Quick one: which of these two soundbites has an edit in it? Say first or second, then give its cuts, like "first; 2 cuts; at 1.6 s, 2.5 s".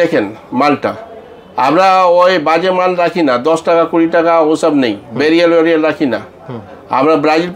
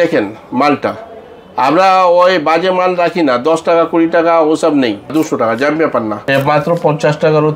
second; 2 cuts; at 5.1 s, 6.2 s